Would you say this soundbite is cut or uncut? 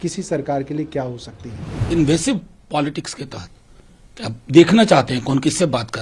cut